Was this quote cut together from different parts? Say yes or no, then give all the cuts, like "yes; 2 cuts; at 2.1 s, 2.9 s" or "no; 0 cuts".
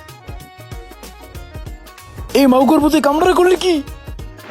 no; 0 cuts